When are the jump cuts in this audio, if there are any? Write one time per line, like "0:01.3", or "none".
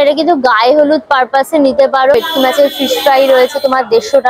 0:02.1